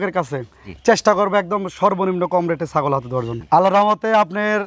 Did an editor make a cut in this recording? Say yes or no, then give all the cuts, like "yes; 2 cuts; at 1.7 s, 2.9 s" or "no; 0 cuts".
yes; 1 cut; at 3.3 s